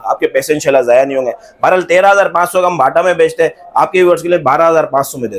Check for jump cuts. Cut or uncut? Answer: uncut